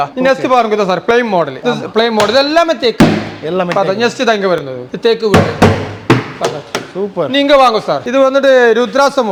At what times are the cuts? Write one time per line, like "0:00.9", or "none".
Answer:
none